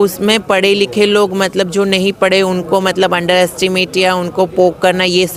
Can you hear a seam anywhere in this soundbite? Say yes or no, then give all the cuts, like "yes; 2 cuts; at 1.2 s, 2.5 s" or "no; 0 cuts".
no; 0 cuts